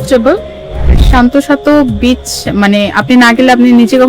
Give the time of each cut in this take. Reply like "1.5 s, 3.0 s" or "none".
1.0 s